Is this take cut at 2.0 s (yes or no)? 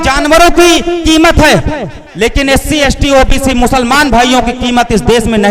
yes